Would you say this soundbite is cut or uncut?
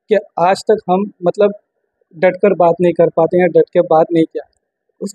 uncut